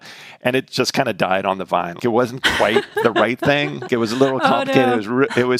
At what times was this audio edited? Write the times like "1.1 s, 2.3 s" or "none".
1.9 s, 3.9 s